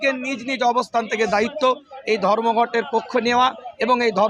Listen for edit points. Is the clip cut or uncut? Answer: uncut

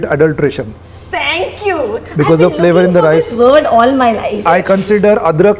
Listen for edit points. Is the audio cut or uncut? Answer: cut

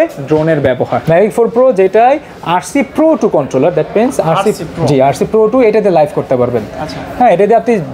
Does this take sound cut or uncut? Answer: cut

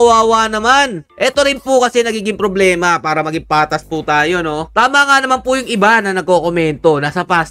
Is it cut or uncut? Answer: uncut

